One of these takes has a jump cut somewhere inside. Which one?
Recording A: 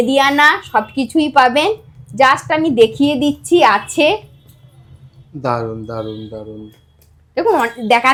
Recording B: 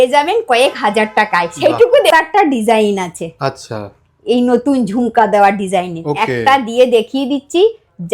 B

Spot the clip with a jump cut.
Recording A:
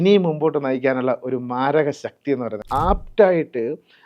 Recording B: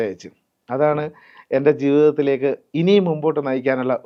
A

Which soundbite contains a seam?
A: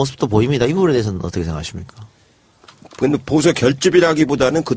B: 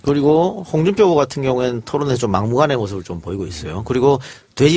A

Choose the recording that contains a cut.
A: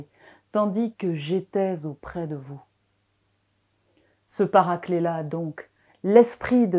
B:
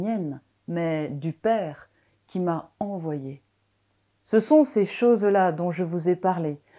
A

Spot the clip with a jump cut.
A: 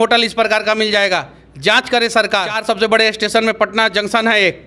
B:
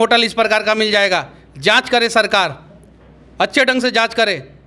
A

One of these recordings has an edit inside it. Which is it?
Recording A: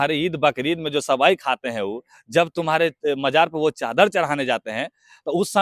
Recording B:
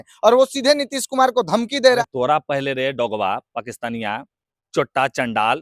B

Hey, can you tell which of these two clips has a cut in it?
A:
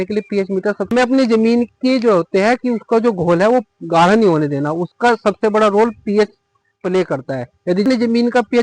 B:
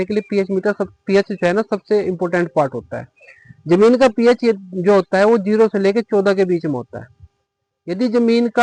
A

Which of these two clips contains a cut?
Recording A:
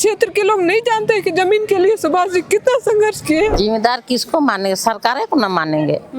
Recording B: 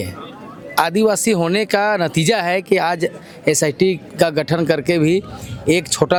A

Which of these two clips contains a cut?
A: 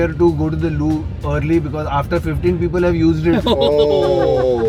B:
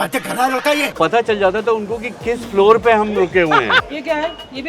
B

